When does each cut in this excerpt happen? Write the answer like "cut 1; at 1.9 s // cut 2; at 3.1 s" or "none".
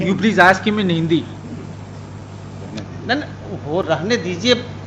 none